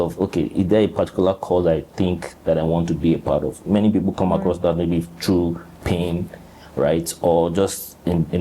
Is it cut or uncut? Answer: uncut